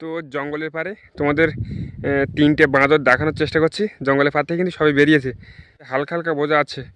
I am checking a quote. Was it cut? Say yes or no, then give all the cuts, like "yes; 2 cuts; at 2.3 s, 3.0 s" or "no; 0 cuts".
yes; 1 cut; at 5.9 s